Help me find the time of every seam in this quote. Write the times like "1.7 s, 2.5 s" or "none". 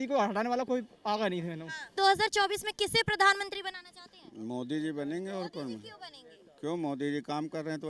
1.9 s

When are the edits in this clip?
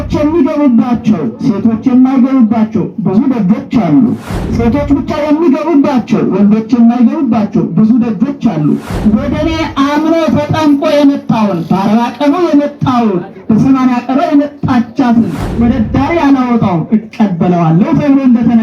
8.9 s, 15.5 s

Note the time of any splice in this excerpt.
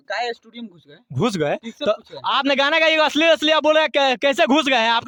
none

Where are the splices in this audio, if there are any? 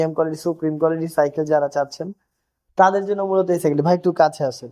none

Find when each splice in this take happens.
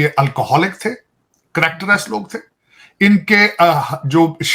none

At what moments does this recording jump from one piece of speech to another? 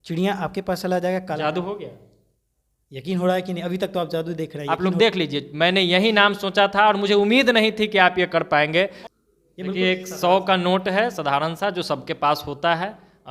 4.6 s, 9.0 s

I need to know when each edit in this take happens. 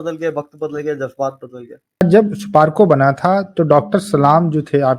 2.0 s

